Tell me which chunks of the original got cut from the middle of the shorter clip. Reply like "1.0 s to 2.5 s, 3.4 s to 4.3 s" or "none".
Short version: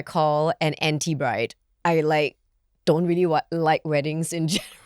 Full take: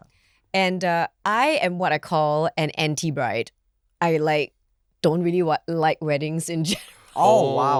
3.6 s to 3.8 s